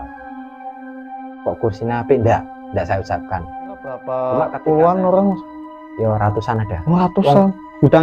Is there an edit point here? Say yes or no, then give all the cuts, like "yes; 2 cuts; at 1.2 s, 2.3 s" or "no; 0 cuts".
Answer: yes; 1 cut; at 4.0 s